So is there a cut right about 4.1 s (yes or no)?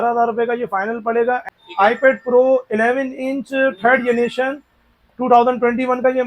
no